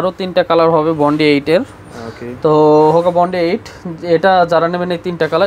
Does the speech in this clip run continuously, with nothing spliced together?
yes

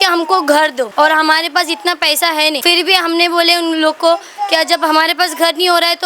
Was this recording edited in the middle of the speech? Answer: yes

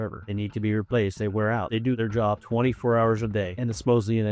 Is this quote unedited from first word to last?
no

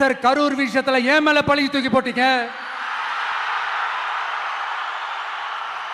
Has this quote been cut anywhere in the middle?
no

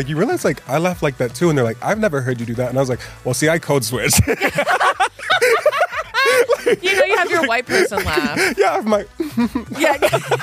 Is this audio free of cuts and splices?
yes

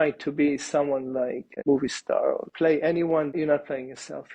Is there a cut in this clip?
yes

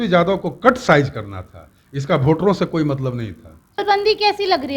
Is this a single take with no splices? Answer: no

